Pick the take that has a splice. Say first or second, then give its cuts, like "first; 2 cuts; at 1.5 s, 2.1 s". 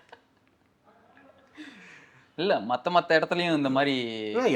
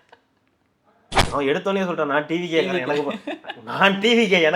second; 1 cut; at 1.1 s